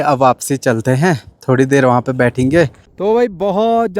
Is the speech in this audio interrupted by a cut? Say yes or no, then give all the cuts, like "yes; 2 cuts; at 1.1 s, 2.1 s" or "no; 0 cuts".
yes; 1 cut; at 2.9 s